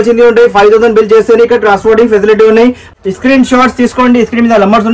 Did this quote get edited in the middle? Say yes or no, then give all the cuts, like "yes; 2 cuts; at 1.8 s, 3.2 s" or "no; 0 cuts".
yes; 1 cut; at 2.9 s